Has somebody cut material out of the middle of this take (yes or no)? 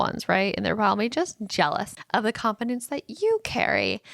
yes